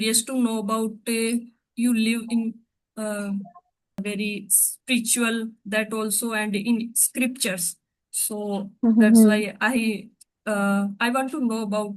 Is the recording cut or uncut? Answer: cut